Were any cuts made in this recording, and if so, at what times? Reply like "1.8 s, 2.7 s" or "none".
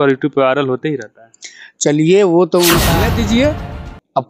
2.9 s